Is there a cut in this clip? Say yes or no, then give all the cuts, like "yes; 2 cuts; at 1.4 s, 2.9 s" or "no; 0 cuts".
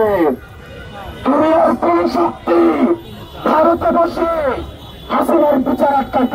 no; 0 cuts